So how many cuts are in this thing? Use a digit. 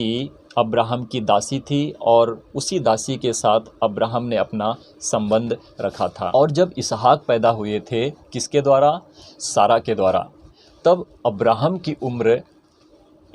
1